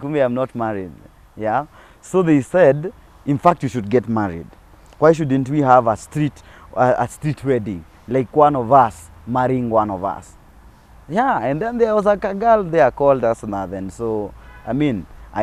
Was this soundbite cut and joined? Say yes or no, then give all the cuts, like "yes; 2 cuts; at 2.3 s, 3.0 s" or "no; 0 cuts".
no; 0 cuts